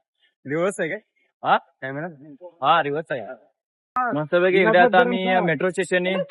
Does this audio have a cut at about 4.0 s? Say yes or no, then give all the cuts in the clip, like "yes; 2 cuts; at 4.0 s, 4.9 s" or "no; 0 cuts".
yes; 1 cut; at 4.0 s